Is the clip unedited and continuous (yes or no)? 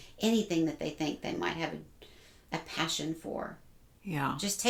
yes